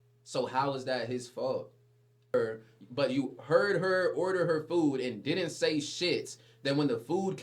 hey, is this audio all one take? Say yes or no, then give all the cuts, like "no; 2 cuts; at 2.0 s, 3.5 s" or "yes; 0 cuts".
no; 1 cut; at 2.3 s